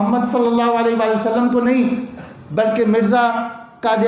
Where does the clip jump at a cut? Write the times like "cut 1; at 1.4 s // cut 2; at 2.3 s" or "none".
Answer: none